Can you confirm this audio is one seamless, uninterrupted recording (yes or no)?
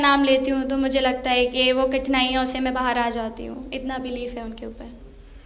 yes